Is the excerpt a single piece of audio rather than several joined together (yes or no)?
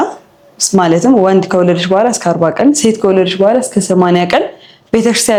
yes